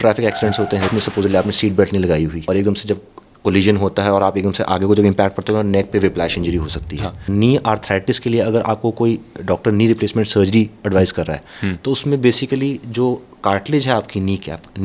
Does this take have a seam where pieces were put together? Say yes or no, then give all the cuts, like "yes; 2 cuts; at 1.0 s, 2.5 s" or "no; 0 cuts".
yes; 3 cuts; at 0.9 s, 2.4 s, 7.3 s